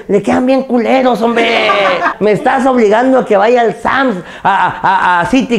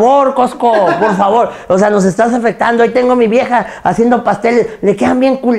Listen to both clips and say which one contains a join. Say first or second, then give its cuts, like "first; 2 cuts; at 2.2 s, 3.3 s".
first; 1 cut; at 2.1 s